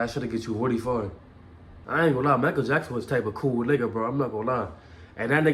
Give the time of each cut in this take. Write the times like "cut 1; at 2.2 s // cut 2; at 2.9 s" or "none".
cut 1; at 1.8 s